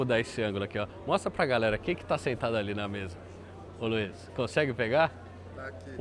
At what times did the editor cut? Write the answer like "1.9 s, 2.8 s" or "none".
none